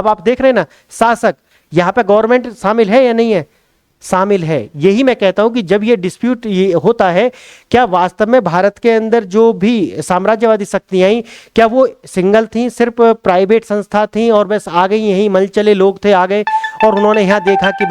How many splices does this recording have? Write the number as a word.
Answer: zero